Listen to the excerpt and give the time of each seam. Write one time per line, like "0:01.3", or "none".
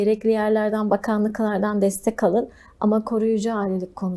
none